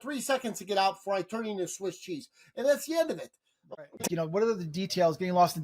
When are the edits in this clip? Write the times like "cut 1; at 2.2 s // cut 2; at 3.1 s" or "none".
cut 1; at 3.8 s